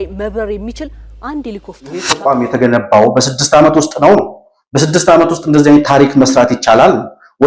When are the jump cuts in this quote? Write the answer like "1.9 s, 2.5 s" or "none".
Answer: 2.1 s

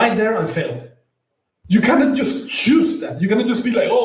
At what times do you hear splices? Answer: 1.5 s

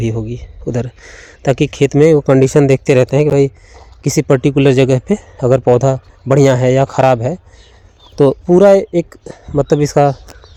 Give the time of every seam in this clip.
none

